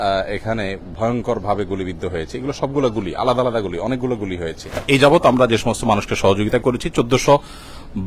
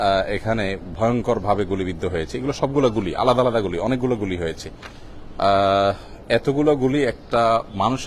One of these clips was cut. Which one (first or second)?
first